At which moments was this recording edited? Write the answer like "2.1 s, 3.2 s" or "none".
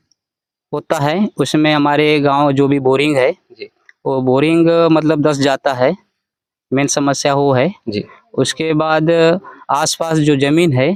none